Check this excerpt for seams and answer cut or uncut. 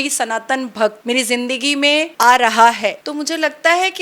cut